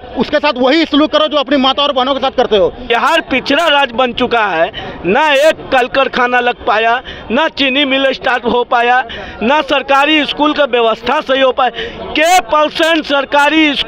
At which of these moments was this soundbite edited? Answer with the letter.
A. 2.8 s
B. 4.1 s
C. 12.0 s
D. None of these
A